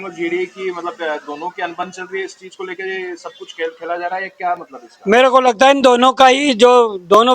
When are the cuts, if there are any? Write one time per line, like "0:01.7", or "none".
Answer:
none